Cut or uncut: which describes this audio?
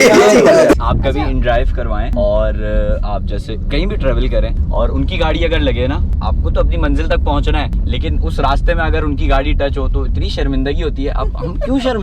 cut